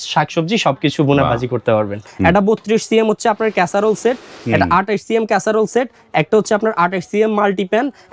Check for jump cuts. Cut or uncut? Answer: cut